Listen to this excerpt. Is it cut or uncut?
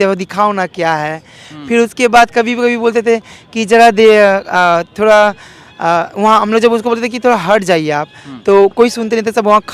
uncut